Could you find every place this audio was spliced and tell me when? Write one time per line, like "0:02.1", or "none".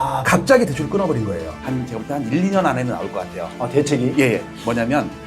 0:01.5